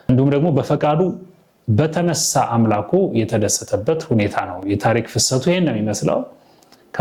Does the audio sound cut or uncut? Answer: uncut